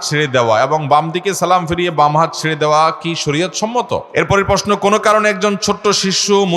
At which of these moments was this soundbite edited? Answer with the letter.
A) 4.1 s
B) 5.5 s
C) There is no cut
A